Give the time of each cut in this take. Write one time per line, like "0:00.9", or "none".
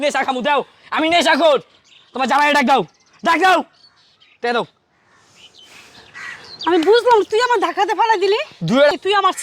0:08.5